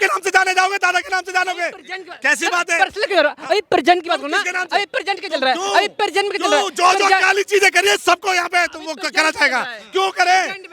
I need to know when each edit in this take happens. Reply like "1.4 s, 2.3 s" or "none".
none